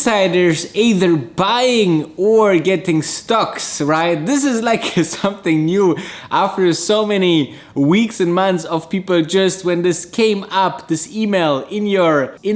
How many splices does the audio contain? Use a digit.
0